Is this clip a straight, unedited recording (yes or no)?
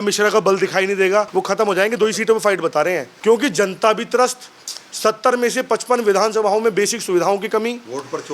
no